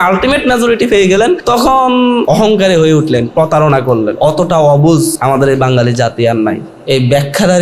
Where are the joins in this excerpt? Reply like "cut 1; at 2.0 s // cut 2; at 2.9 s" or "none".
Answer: cut 1; at 1.4 s // cut 2; at 2.2 s // cut 3; at 4.1 s // cut 4; at 5.2 s // cut 5; at 6.7 s